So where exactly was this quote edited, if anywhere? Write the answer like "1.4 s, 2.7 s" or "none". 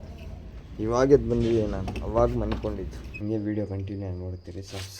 3.0 s